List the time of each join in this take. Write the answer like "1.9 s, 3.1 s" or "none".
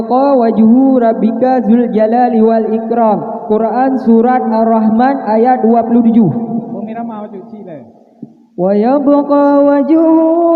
none